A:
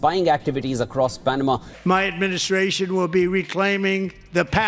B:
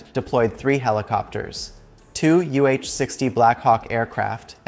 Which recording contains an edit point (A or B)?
A